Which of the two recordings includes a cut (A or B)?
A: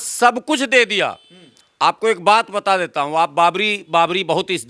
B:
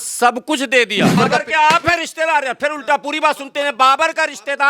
B